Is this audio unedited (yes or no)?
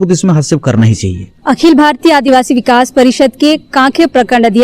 yes